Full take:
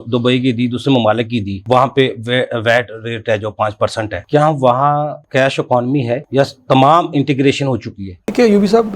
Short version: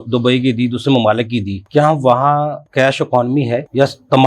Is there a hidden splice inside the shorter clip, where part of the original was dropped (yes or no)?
yes